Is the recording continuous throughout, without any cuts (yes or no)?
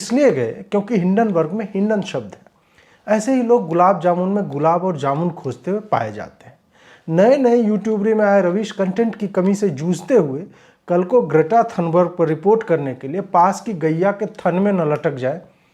yes